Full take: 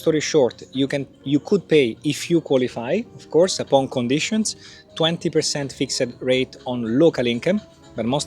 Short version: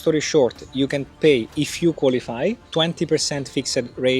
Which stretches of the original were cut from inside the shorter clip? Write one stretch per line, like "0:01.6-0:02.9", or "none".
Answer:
0:01.2-0:01.6
0:03.1-0:04.9